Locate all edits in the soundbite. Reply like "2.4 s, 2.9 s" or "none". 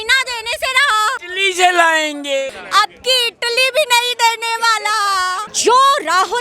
1.3 s, 2.5 s, 5.5 s

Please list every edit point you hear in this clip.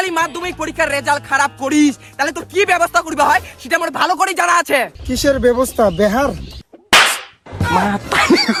none

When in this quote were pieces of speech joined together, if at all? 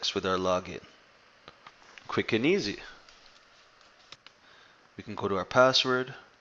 4.2 s

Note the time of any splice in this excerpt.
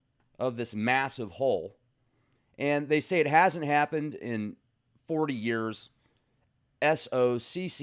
none

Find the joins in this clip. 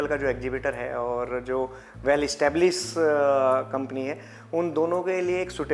none

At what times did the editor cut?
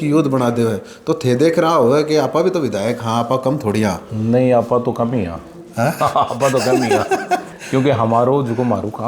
none

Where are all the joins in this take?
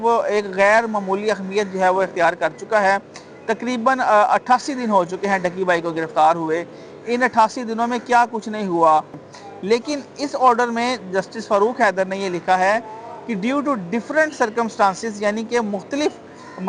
9.3 s

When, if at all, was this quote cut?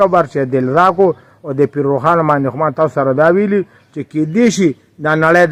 none

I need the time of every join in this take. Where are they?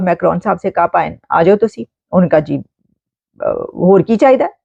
none

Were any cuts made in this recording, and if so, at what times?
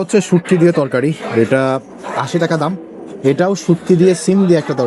none

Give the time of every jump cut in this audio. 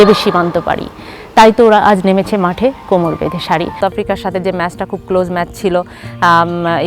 3.8 s

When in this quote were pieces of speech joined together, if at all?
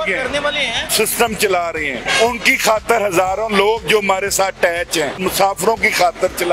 0.9 s, 2.0 s, 5.2 s

